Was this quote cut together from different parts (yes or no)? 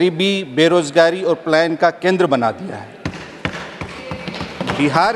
no